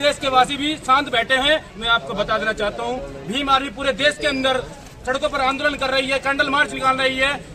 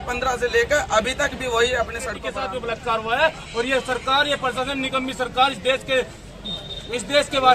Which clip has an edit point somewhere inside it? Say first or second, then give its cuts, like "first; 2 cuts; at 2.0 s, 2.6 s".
second; 1 cut; at 2.3 s